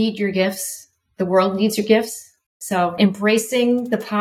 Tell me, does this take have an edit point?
yes; 1 cut; at 2.9 s

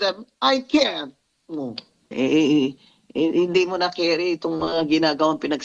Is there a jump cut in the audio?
yes; 1 cut; at 2.1 s

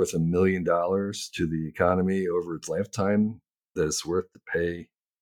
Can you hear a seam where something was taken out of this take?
no; 0 cuts

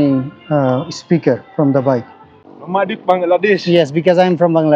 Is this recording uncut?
no; 1 cut; at 2.3 s

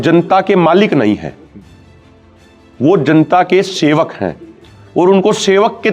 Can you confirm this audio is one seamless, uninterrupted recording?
yes; 0 cuts

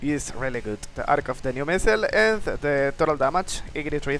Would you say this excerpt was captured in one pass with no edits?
yes; 0 cuts

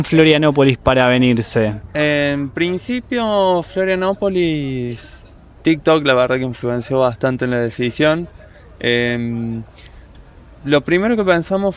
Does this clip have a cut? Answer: no; 0 cuts

